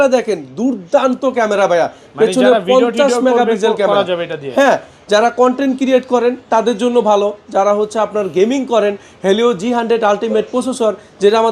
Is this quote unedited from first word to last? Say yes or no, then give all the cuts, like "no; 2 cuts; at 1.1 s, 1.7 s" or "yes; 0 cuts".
yes; 0 cuts